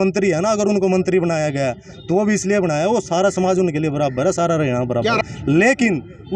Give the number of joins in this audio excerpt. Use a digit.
1